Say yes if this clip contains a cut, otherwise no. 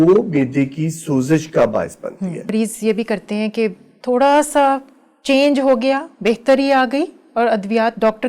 yes